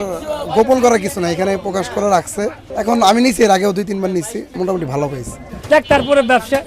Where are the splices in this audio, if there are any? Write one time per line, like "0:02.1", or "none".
0:02.6
0:04.5
0:05.5